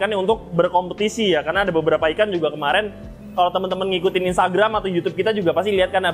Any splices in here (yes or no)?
no